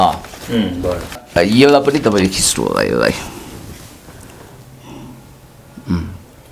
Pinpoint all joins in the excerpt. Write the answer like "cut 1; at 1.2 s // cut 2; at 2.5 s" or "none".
cut 1; at 1.1 s